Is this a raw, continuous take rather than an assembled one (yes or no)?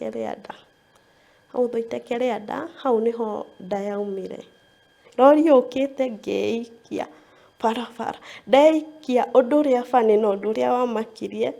no